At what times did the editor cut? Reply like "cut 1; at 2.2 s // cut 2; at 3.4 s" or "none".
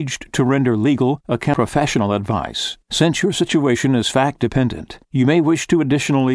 cut 1; at 1.5 s